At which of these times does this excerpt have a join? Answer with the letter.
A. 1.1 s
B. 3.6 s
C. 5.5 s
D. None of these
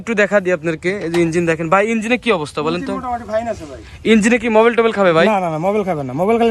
D